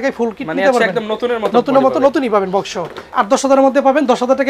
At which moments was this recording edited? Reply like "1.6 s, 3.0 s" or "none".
3.0 s